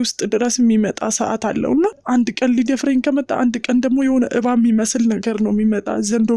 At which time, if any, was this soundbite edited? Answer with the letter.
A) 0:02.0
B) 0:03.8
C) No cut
A